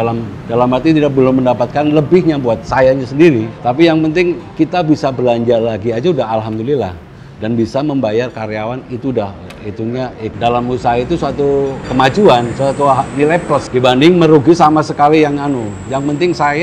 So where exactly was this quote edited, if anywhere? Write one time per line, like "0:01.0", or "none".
0:02.7
0:10.3